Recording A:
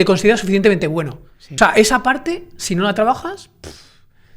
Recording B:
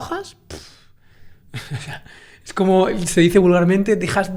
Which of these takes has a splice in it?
A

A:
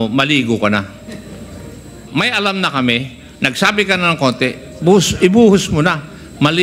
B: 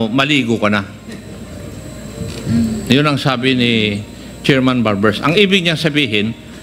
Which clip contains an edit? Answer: A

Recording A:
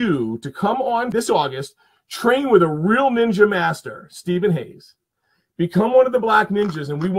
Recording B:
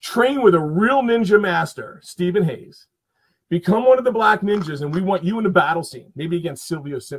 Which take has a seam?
A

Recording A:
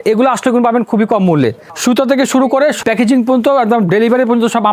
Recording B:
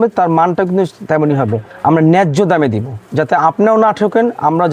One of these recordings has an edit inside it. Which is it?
A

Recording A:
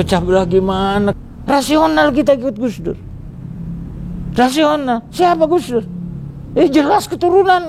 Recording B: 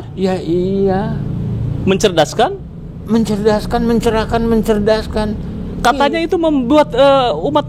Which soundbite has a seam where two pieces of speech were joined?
A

